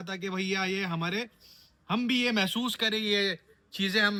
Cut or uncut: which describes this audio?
uncut